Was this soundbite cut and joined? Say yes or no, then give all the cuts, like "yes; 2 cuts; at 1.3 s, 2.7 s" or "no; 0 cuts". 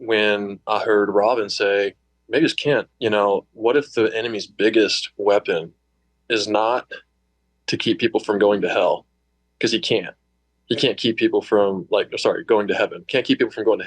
yes; 2 cuts; at 2.1 s, 2.9 s